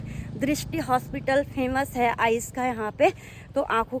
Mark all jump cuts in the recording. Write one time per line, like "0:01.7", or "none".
none